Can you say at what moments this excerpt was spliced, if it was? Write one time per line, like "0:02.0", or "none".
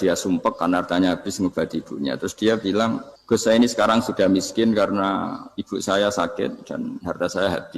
0:03.1